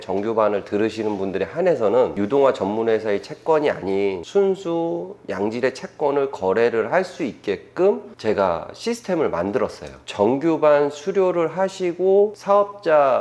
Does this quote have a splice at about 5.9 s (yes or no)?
no